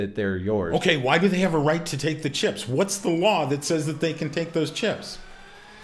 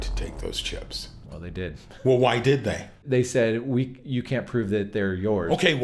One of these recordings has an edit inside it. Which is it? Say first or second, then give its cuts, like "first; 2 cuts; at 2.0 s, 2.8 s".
second; 1 cut; at 3.0 s